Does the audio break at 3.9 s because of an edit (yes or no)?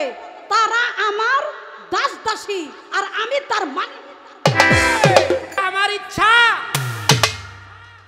no